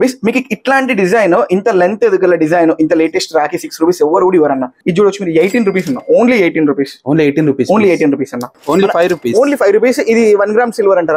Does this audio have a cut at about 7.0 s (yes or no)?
no